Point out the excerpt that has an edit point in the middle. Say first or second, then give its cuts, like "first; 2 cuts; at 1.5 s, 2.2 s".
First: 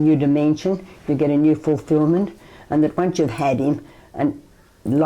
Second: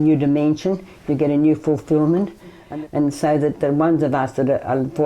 second; 1 cut; at 2.6 s